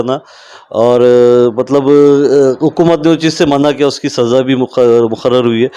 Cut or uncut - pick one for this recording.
uncut